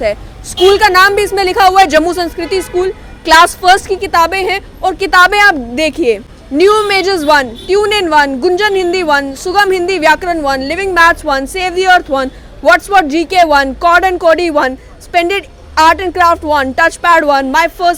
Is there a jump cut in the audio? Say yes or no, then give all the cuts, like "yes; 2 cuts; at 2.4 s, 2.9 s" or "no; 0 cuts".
no; 0 cuts